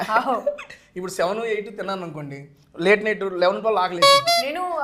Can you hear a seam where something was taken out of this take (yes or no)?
no